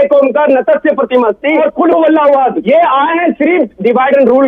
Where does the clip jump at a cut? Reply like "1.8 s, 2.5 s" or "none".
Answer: 1.6 s, 2.6 s